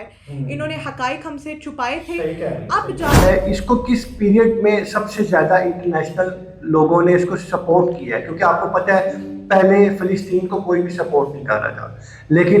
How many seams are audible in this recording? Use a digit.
1